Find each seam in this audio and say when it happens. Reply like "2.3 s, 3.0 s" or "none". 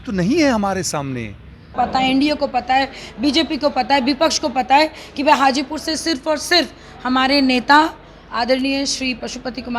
1.7 s